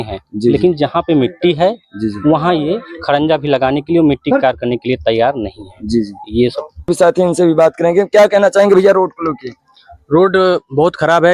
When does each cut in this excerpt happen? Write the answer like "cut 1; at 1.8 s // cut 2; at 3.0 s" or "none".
cut 1; at 6.9 s